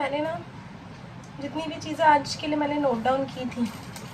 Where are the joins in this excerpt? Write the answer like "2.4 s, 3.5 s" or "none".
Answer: none

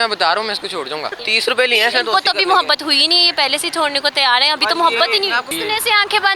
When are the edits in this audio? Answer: 1.2 s, 5.5 s

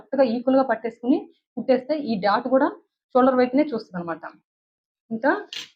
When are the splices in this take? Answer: none

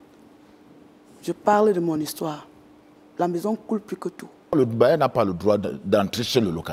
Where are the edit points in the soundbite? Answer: 4.5 s

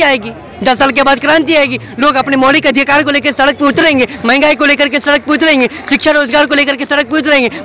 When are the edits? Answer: none

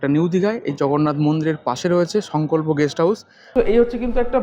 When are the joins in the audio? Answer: 3.5 s

